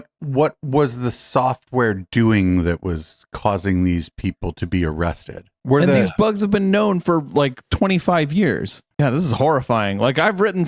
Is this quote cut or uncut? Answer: cut